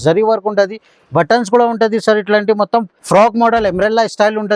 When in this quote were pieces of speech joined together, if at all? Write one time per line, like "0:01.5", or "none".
0:03.0

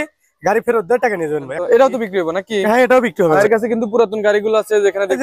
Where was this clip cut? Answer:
0:01.5
0:03.4

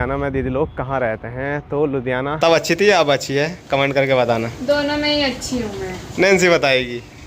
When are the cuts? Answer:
0:02.4

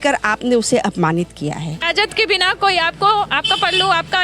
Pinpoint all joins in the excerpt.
0:01.9

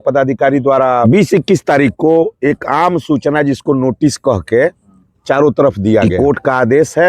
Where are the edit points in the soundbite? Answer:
0:01.0
0:06.1

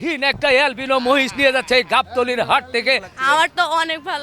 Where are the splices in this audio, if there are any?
0:03.1

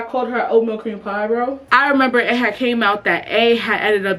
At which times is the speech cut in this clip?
0:01.6

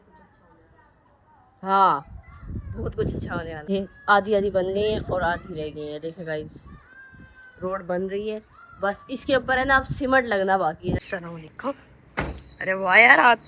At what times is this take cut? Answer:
0:03.6
0:11.0

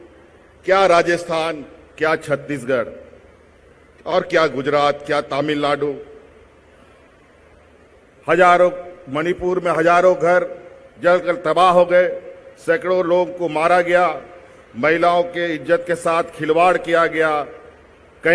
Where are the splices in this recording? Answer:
none

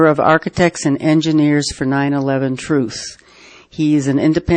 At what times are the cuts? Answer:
0:03.2

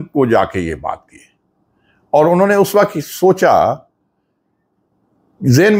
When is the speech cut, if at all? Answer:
none

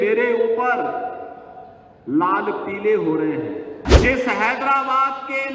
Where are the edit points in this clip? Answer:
0:03.8

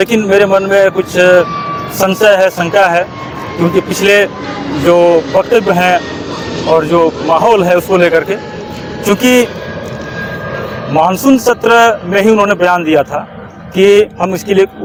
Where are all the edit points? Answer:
none

